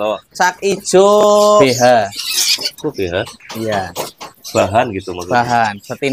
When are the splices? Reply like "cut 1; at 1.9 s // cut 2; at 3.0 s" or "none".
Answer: cut 1; at 1.6 s